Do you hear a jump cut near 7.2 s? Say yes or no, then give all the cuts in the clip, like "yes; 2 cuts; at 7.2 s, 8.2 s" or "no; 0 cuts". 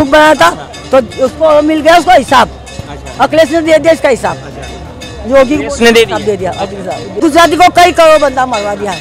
yes; 1 cut; at 7.2 s